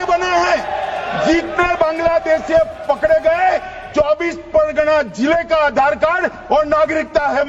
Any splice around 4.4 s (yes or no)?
no